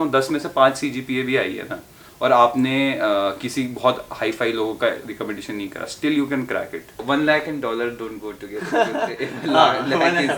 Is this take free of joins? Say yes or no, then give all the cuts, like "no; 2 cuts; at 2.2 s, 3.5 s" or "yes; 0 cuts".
no; 1 cut; at 7.0 s